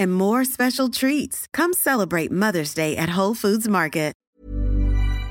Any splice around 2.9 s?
no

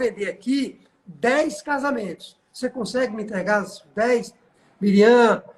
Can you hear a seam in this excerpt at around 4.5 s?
yes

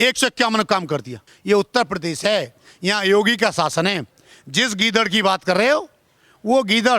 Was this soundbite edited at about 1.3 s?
yes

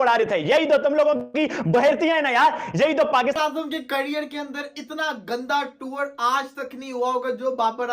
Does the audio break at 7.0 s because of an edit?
no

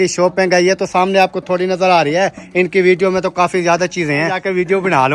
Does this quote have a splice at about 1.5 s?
no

